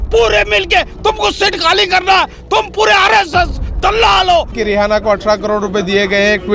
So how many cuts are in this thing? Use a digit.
1